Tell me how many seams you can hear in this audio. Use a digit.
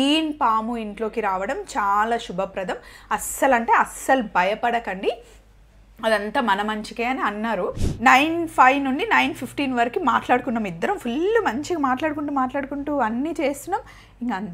1